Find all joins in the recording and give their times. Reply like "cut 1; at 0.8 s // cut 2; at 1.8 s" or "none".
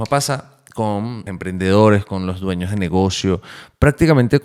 cut 1; at 1.2 s